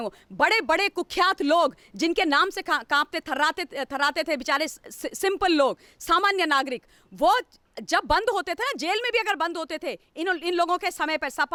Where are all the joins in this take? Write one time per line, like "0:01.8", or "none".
none